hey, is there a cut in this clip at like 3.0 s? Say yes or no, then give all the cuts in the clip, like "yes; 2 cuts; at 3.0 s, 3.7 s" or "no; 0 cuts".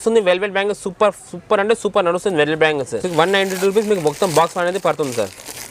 no; 0 cuts